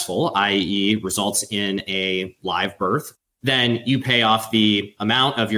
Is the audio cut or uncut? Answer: uncut